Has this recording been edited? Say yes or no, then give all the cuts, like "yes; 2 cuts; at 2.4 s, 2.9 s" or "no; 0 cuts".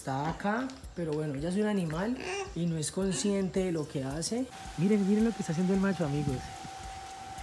yes; 1 cut; at 4.6 s